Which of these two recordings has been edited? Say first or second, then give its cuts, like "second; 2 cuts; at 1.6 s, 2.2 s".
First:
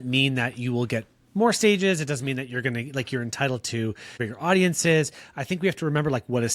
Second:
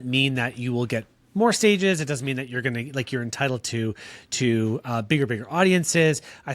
first; 1 cut; at 4.3 s